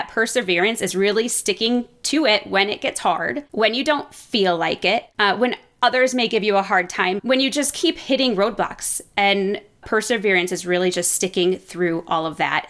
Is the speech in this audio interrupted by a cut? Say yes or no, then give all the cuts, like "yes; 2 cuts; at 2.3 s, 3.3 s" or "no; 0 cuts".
yes; 4 cuts; at 3.4 s, 5.1 s, 7.2 s, 9.8 s